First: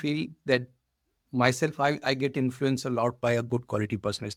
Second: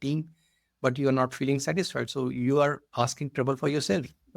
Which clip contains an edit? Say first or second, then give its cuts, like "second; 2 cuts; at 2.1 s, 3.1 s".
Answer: second; 1 cut; at 2.8 s